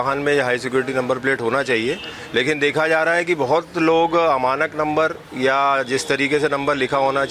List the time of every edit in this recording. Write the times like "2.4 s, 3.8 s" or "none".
none